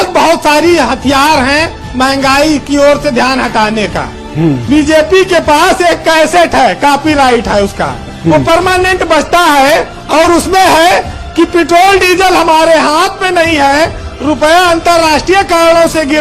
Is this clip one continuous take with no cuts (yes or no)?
no